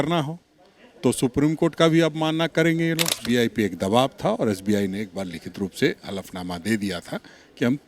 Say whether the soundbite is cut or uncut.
cut